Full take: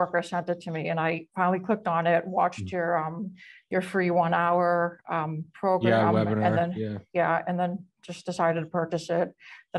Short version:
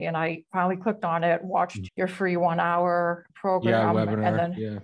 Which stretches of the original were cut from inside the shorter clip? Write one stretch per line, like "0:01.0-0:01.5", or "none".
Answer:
0:02.6-0:03.5
0:05.0-0:05.5